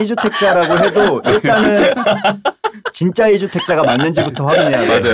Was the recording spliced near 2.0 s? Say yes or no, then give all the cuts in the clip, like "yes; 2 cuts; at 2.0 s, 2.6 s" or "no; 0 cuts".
no; 0 cuts